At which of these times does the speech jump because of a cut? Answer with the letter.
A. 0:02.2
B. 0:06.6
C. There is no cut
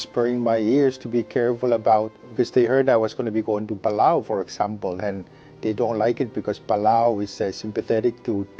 A